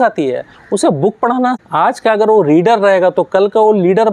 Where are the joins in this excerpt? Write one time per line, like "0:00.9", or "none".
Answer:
0:01.6